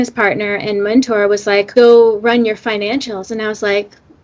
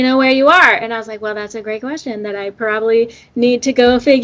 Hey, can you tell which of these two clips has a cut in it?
first; 1 cut; at 1.7 s

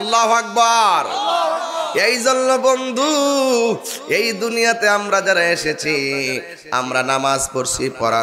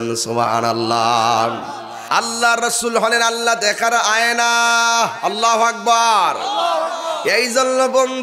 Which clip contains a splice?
second; 1 cut; at 1.9 s

